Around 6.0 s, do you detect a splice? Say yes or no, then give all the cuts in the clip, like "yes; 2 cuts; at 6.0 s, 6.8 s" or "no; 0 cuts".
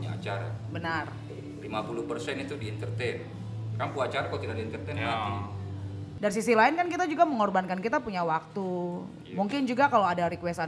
yes; 1 cut; at 6.0 s